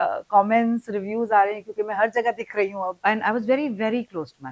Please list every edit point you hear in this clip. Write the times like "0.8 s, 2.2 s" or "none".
3.0 s